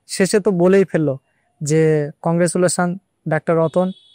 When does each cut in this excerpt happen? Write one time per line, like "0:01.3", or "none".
0:02.2